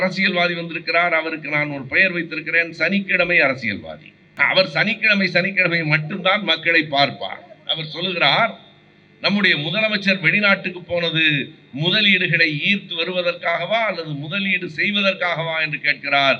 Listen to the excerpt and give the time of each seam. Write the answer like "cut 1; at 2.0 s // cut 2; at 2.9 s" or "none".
cut 1; at 4.4 s